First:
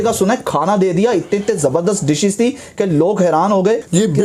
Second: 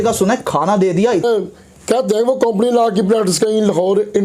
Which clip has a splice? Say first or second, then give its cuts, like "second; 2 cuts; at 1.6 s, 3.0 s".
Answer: second; 1 cut; at 1.2 s